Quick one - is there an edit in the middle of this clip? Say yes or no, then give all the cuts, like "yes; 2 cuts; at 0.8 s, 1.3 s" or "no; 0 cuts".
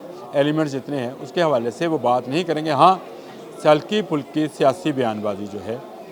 no; 0 cuts